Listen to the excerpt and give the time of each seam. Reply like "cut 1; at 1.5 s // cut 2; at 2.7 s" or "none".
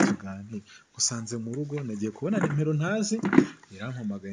none